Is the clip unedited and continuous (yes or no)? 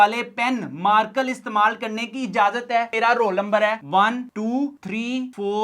no